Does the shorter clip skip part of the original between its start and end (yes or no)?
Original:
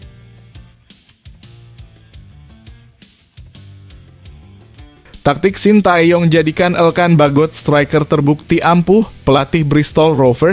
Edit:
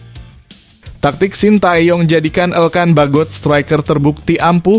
yes